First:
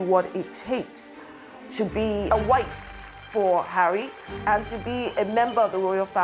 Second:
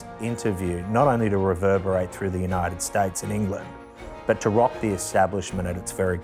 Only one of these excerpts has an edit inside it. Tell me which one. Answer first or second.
first